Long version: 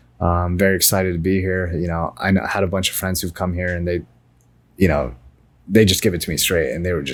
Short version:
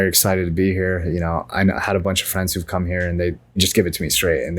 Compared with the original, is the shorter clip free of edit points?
no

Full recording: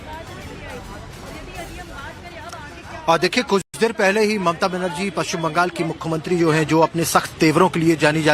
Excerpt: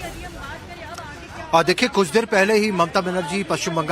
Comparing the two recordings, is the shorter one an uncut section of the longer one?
no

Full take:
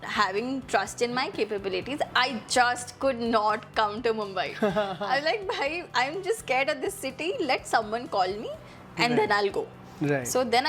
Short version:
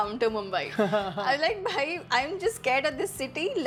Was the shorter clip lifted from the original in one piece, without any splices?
yes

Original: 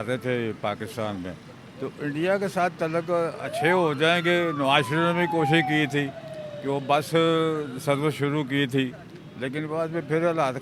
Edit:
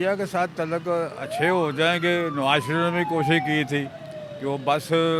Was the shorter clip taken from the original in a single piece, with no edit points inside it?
yes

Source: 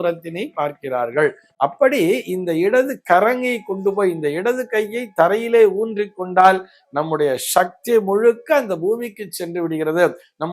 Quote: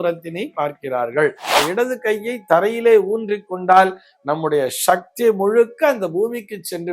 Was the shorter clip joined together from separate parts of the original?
yes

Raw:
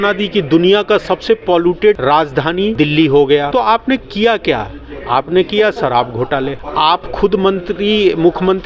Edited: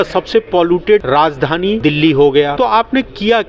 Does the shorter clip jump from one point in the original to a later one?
no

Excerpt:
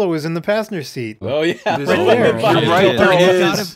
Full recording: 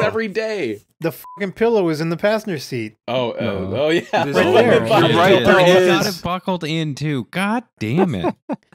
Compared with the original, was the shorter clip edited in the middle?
yes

